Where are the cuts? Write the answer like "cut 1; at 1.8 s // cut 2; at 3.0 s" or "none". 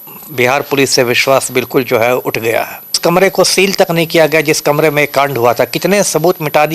cut 1; at 3.0 s